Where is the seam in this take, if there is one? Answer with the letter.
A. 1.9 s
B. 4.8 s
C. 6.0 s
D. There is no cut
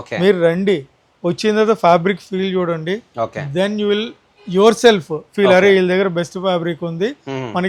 D